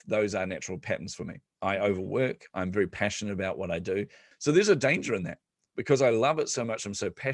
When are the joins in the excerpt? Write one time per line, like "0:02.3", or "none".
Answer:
0:04.3